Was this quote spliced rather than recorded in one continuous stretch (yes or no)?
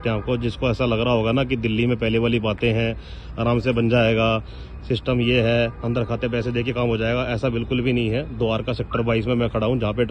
no